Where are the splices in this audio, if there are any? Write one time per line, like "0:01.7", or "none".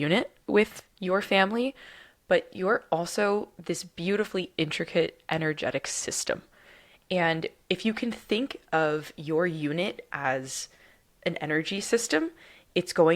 none